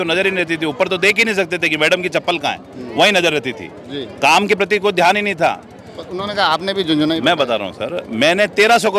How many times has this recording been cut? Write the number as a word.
zero